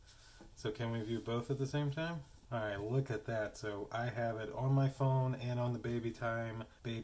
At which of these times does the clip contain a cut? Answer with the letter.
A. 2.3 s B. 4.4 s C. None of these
A